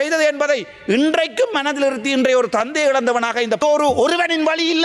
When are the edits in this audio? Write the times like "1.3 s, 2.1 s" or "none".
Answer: 3.6 s